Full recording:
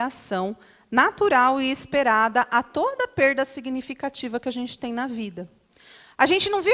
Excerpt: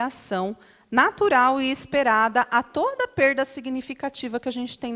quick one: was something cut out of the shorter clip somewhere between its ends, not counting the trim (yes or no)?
no